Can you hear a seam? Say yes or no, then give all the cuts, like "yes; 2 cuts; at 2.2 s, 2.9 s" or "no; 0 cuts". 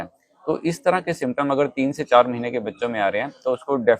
no; 0 cuts